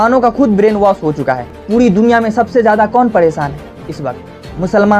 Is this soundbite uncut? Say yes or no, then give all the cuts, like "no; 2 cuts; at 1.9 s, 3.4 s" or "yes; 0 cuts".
no; 1 cut; at 1.5 s